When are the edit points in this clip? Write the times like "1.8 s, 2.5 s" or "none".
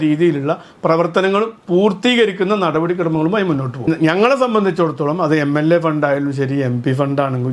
3.9 s